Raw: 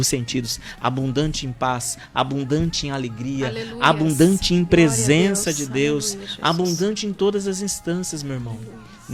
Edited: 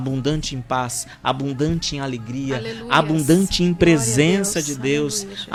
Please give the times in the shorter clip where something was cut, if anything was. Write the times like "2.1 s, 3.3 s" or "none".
none